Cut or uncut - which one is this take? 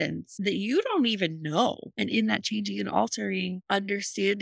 cut